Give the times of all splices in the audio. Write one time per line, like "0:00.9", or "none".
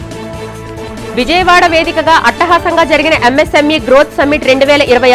0:01.1